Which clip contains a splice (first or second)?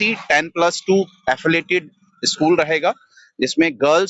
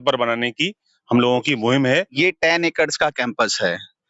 second